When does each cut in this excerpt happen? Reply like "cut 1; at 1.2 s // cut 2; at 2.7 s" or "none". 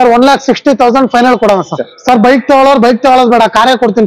cut 1; at 1.9 s

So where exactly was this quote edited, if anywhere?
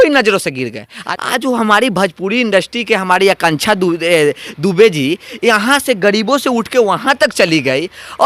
cut 1; at 1.0 s

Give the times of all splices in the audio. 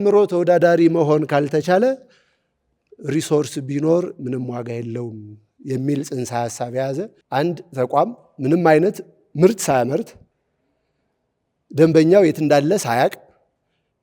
cut 1; at 7.2 s

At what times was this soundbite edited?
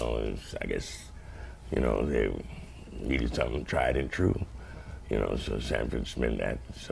none

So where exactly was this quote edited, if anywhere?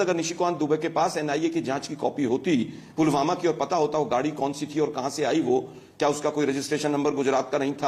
none

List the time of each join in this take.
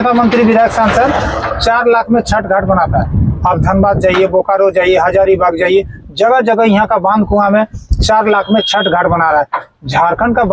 none

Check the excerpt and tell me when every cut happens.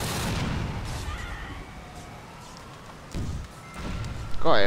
cut 1; at 2.7 s

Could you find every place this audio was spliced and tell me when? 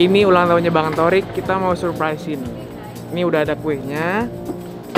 none

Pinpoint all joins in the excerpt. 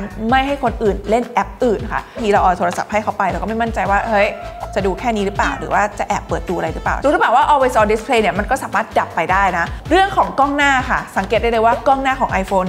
cut 1; at 2.2 s // cut 2; at 6.9 s // cut 3; at 9.7 s

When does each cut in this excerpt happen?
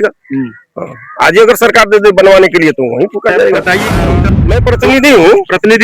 cut 1; at 4.2 s

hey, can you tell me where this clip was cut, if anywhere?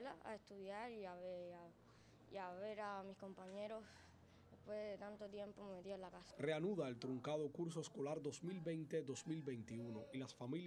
none

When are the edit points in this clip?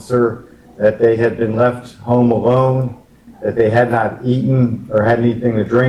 none

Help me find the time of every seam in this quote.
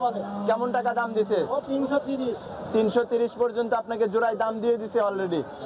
none

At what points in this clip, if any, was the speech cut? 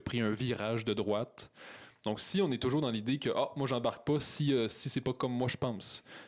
none

